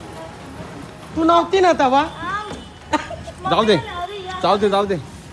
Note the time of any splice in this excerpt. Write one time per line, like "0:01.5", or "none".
none